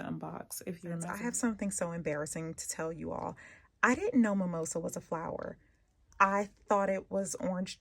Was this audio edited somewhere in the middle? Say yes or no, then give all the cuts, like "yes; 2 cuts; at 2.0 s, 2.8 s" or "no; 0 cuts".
yes; 1 cut; at 1.1 s